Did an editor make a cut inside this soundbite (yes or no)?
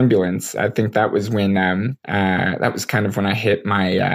no